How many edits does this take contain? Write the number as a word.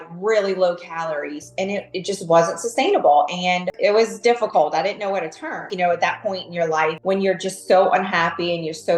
two